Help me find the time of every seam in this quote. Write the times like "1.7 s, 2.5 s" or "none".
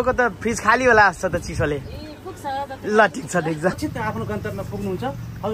3.8 s